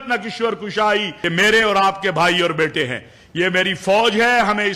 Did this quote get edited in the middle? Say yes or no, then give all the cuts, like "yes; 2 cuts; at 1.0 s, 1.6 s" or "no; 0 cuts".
yes; 1 cut; at 1.2 s